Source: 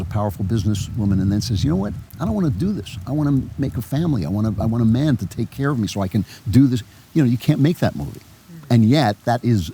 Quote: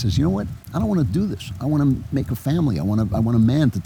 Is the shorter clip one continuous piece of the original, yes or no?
yes